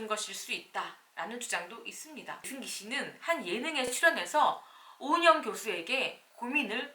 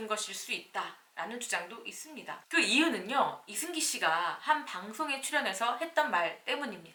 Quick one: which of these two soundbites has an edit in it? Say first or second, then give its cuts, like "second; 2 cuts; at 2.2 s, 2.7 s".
first; 1 cut; at 2.4 s